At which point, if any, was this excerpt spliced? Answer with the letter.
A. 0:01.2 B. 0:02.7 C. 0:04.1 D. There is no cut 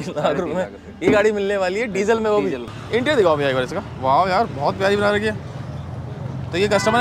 B